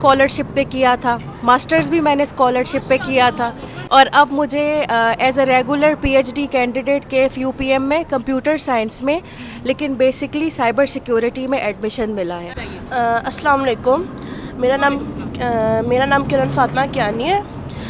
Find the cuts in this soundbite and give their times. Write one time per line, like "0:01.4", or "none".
0:03.7
0:12.6